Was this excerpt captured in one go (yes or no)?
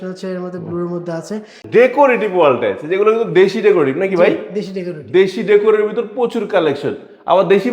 no